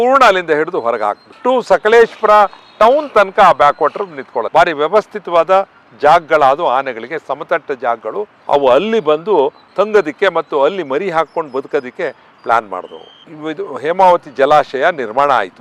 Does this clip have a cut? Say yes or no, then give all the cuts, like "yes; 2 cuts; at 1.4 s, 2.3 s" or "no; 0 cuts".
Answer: yes; 4 cuts; at 1.3 s, 4.5 s, 8.4 s, 13.3 s